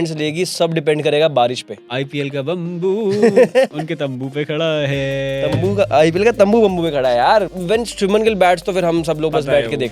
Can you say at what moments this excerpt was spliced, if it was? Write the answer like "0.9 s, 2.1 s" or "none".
1.8 s, 7.5 s